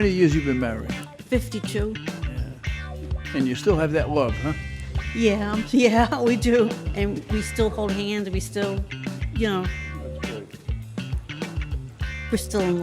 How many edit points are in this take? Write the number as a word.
one